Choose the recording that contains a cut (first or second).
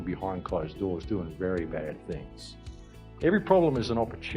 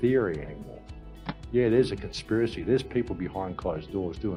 first